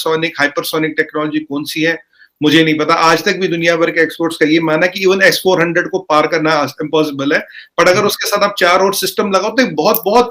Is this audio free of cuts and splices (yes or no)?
yes